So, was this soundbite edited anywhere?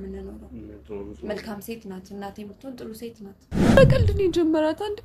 yes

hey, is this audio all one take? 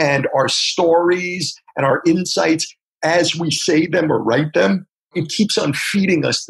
no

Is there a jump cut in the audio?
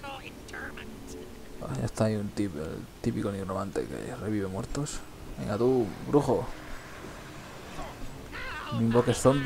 yes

